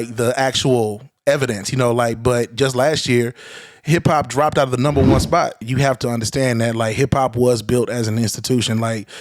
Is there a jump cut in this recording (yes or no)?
yes